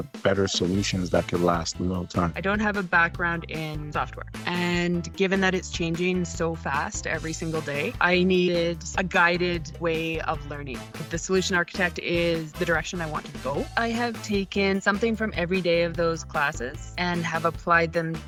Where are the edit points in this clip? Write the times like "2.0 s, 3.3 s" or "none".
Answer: none